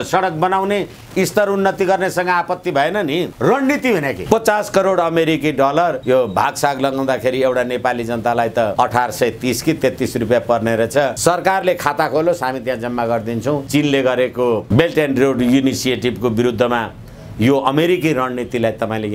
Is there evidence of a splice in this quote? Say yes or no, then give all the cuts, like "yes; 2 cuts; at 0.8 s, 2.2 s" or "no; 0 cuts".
yes; 7 cuts; at 3.3 s, 4.2 s, 6.0 s, 8.7 s, 11.2 s, 13.6 s, 14.6 s